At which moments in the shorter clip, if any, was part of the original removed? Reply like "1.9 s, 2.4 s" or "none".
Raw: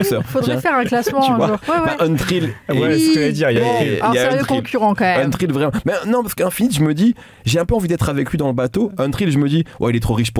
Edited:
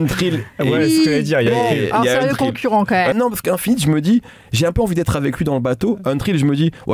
3.1 s